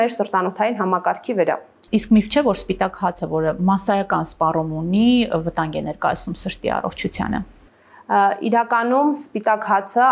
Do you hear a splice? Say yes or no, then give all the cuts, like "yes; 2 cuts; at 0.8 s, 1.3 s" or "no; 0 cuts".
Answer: no; 0 cuts